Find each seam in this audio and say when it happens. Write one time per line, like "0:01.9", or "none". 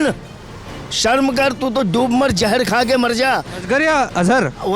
none